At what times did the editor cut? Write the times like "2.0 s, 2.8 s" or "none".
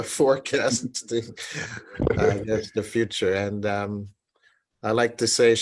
none